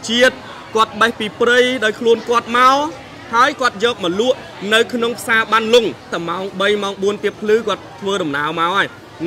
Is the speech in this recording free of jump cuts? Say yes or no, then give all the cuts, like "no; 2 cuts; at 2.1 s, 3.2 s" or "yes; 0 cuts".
no; 1 cut; at 6.1 s